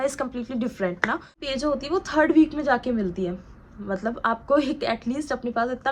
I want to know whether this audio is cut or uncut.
cut